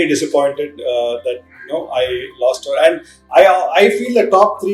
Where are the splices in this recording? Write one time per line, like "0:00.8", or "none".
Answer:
none